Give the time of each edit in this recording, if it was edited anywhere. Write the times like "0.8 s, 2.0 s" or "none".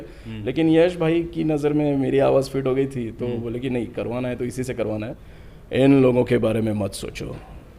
5.2 s